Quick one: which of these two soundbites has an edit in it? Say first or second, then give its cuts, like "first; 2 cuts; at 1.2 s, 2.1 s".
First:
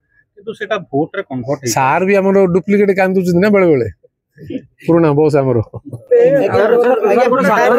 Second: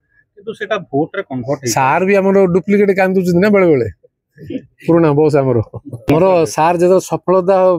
second; 1 cut; at 6.1 s